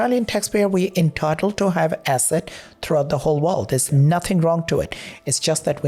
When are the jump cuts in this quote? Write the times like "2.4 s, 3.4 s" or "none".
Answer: none